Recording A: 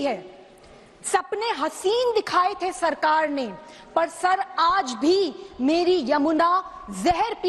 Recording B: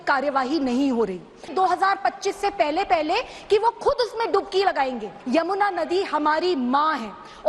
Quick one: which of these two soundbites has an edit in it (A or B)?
B